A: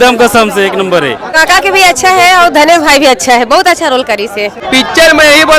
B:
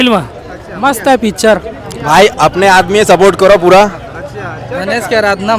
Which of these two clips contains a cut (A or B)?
A